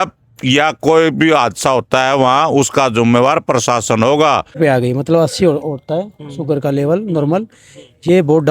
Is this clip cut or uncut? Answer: cut